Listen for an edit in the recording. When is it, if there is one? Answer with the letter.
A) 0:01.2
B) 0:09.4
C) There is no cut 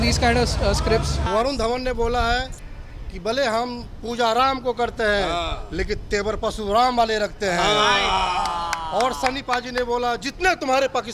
A